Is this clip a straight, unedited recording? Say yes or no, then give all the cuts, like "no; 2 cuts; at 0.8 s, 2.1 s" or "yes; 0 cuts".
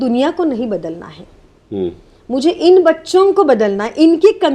yes; 0 cuts